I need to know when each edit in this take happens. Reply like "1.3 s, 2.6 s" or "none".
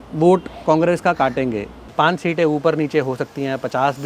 1.8 s